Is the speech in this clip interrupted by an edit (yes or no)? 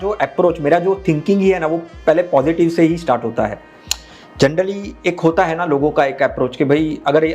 no